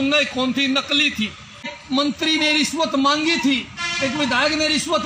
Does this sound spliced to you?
yes; 1 cut; at 1.8 s

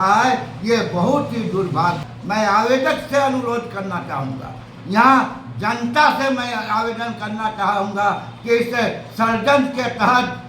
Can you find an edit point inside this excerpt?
yes; 1 cut; at 2.1 s

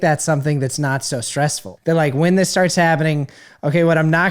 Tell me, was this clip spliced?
yes; 1 cut; at 1.7 s

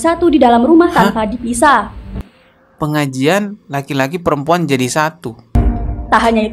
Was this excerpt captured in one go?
no; 1 cut; at 5.6 s

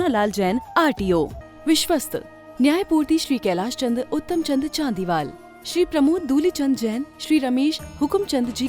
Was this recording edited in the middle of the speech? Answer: yes; 1 cut; at 1.4 s

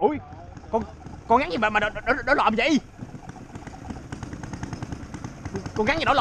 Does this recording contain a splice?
no; 0 cuts

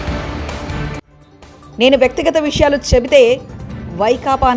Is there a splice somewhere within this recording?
yes; 1 cut; at 1.1 s

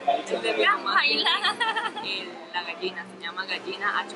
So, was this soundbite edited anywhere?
no; 0 cuts

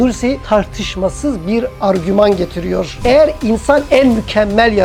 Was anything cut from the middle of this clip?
yes; 1 cut; at 3.0 s

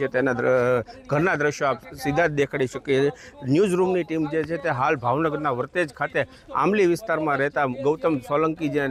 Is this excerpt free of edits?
yes; 0 cuts

